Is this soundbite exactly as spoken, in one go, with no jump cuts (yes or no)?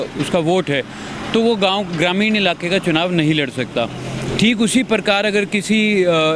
yes